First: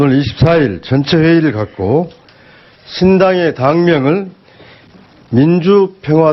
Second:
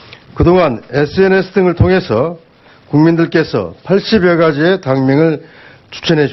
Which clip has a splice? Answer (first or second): first